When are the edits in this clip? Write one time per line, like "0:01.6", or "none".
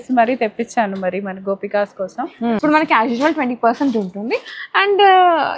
0:02.6